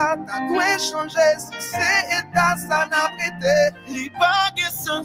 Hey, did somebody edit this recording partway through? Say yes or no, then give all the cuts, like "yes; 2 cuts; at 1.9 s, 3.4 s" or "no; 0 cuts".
no; 0 cuts